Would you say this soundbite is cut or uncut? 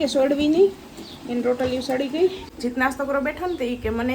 cut